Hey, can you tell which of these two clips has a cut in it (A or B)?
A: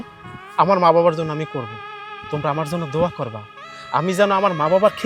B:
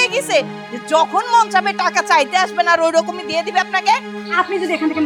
B